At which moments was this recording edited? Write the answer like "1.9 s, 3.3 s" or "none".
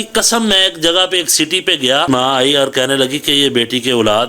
2.1 s